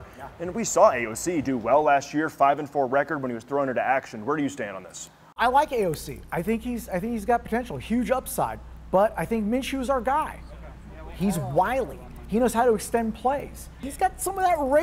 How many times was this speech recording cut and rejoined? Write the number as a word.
two